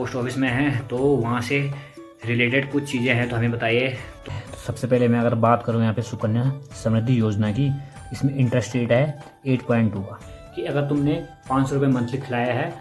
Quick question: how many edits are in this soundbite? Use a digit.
2